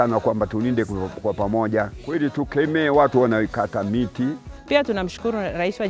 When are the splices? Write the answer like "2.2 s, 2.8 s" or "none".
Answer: 2.0 s, 4.5 s